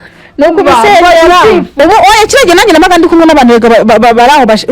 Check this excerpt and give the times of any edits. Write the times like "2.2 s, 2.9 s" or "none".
1.7 s

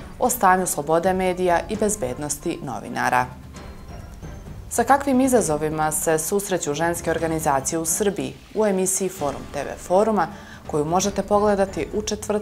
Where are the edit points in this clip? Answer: 3.4 s, 4.7 s

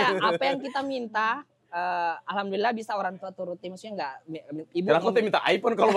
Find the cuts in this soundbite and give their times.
none

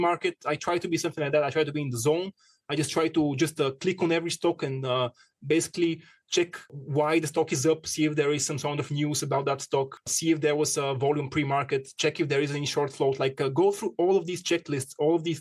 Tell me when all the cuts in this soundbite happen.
6.8 s, 10.1 s

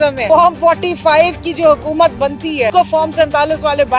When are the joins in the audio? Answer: 2.7 s

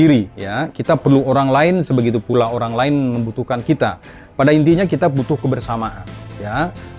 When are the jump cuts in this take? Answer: none

